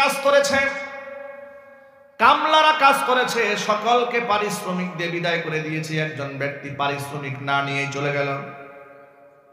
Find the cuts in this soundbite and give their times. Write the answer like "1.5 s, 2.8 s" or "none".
none